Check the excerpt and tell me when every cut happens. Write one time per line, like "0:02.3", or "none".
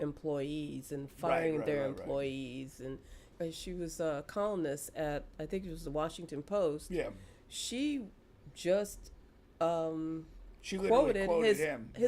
0:03.3